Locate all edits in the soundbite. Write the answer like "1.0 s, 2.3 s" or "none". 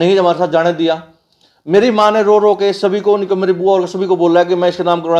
none